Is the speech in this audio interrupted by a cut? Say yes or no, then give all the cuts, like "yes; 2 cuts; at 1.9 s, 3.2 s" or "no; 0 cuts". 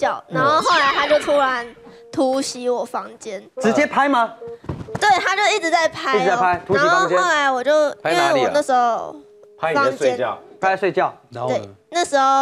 no; 0 cuts